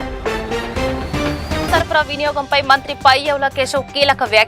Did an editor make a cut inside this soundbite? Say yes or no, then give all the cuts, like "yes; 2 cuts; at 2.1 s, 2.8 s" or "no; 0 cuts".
yes; 1 cut; at 1.7 s